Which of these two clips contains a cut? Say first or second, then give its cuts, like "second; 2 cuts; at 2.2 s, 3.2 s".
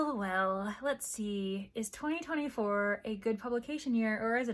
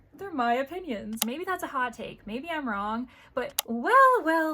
second; 2 cuts; at 1.2 s, 3.1 s